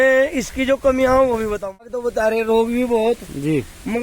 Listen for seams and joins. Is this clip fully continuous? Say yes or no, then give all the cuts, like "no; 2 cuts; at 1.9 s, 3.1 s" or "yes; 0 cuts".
no; 1 cut; at 1.8 s